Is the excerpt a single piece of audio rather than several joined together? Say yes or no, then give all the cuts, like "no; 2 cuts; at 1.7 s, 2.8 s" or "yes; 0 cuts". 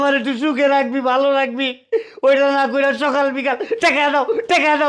yes; 0 cuts